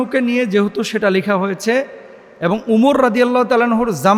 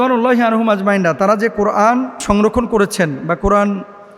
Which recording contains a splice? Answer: second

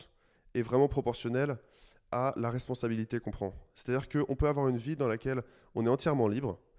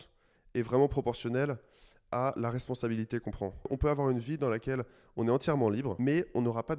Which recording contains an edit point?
second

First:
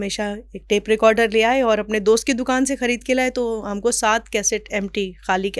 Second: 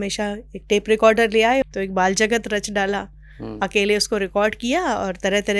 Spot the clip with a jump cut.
second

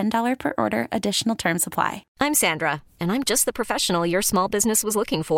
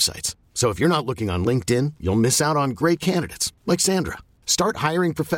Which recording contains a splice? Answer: first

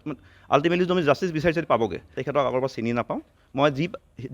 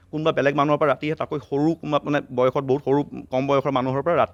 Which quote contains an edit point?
first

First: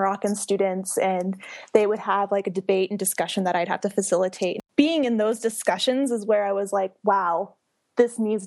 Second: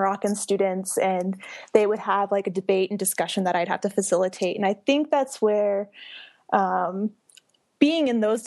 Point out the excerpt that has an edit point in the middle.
first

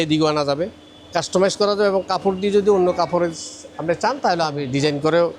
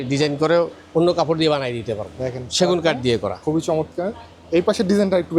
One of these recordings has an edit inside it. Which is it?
second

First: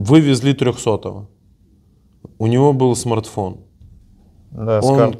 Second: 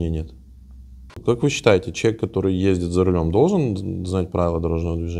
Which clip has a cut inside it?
second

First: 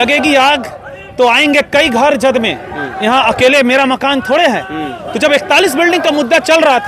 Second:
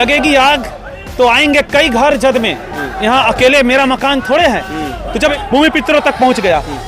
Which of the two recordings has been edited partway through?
second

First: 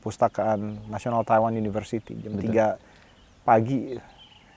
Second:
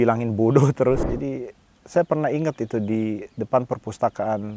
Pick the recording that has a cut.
second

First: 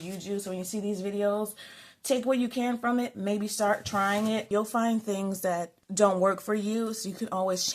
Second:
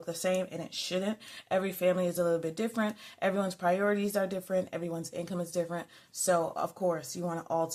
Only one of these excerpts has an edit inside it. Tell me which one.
first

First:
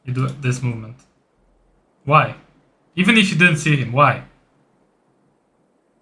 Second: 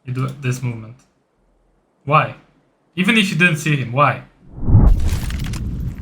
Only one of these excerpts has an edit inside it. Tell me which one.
second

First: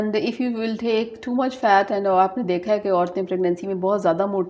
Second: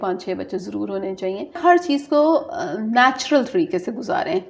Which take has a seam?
second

